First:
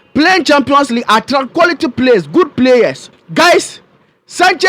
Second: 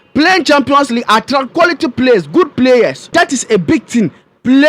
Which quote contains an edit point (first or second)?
first